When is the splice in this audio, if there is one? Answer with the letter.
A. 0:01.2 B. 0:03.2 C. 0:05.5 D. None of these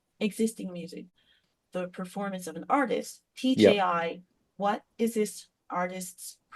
A